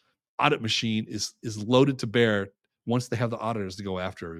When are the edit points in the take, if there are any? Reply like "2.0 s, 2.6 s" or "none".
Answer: none